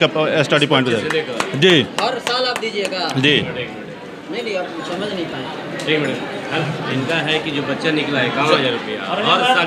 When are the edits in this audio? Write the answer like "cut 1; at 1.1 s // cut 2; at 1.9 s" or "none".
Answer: none